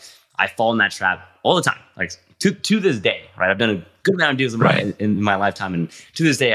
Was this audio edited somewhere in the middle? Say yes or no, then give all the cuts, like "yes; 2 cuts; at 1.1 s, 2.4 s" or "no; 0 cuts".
no; 0 cuts